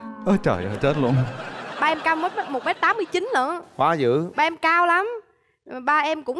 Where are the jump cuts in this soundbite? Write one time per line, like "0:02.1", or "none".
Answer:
none